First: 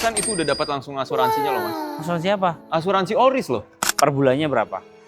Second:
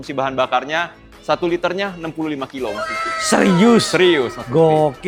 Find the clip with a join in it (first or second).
first